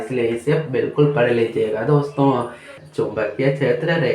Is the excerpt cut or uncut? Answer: cut